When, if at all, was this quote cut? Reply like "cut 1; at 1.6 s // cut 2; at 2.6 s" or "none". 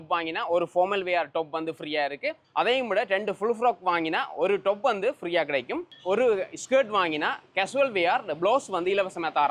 none